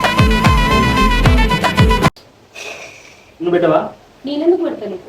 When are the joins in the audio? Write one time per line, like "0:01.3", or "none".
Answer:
none